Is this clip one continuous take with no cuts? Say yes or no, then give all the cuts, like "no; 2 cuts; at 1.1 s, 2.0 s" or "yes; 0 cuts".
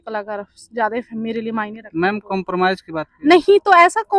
yes; 0 cuts